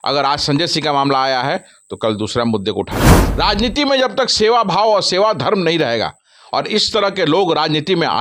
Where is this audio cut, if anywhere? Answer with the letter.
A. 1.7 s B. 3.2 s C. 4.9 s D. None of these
B